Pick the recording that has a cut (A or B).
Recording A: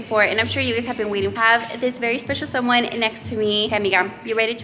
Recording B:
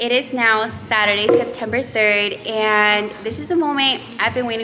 A